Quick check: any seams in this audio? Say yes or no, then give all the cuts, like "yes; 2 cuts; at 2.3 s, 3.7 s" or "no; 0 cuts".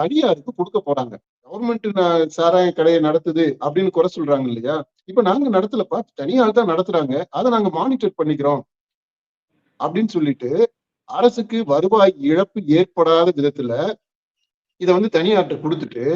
yes; 1 cut; at 1.6 s